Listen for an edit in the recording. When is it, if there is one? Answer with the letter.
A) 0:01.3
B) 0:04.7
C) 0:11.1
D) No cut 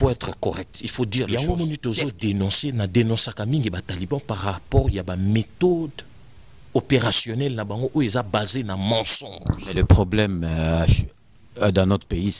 A